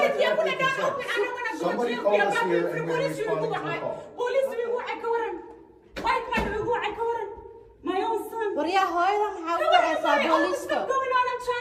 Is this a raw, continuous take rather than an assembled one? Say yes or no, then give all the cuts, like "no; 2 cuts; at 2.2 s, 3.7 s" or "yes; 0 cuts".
yes; 0 cuts